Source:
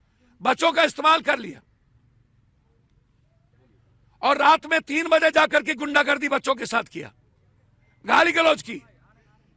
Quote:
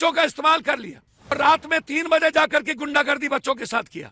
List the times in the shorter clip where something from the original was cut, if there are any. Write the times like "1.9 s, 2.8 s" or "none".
1.3 s